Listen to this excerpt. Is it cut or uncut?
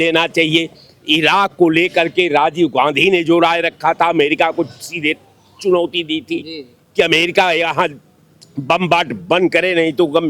uncut